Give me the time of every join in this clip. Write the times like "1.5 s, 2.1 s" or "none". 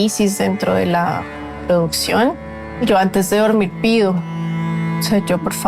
2.8 s